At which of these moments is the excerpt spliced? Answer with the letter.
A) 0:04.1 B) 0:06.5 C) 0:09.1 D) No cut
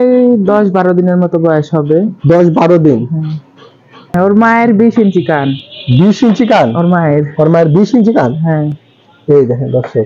A